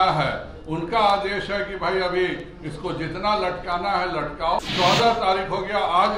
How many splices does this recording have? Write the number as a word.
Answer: one